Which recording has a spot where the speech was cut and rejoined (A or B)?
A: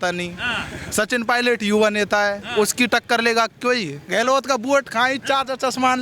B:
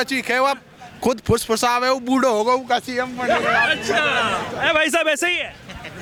A